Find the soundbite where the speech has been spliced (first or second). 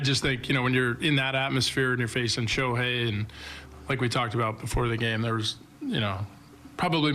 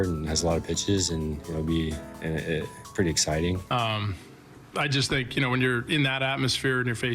second